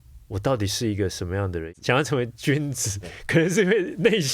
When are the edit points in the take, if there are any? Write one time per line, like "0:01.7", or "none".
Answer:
0:01.7